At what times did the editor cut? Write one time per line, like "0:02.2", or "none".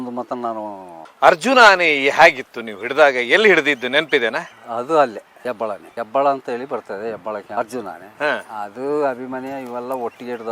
0:00.9